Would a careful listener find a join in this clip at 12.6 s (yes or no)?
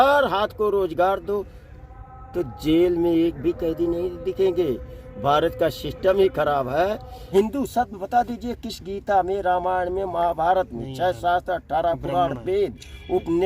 no